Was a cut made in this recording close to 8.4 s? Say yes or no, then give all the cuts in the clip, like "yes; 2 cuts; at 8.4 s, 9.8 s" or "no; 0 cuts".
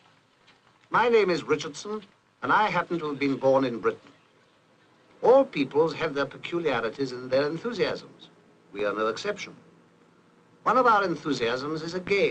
no; 0 cuts